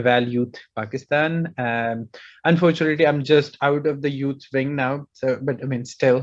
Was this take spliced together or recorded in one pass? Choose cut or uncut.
uncut